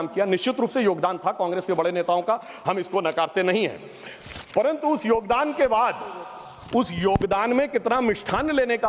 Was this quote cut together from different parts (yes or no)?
no